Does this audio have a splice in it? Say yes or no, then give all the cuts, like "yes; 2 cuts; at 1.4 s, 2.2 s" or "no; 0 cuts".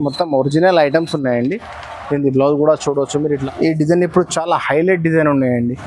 yes; 1 cut; at 3.4 s